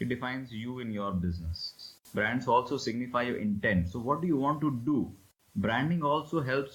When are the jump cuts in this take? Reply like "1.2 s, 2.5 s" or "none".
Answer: 1.7 s, 5.2 s